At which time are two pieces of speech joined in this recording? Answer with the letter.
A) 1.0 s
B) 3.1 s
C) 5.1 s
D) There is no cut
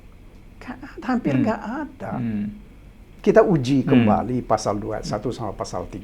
B